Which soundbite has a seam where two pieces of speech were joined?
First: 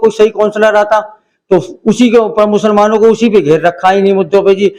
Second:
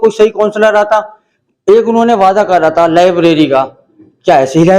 second; 1 cut; at 1.3 s

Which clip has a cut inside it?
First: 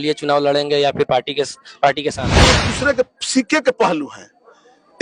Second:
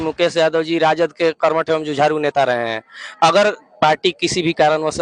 first; 1 cut; at 2.6 s

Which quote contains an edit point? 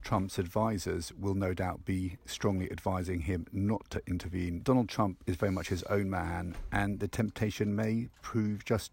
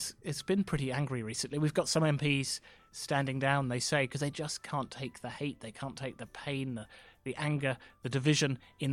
first; 1 cut; at 4.6 s

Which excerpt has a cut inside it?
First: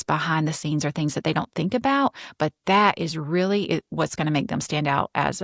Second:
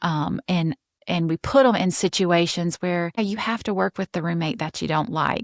second; 2 cuts; at 0.9 s, 3.2 s

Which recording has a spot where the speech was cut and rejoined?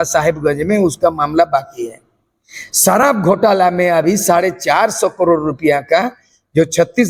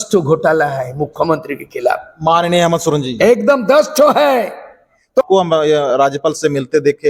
second; 1 cut; at 5.3 s

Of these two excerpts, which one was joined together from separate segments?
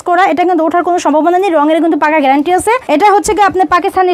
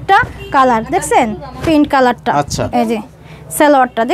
first; 1 cut; at 2.8 s

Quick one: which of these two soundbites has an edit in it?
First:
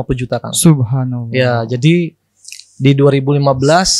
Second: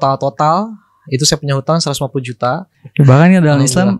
second; 1 cut; at 2.7 s

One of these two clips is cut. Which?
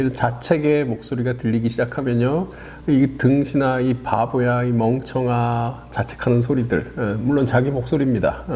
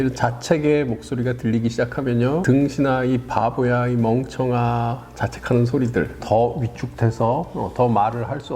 second; 2 cuts; at 2.4 s, 6.2 s

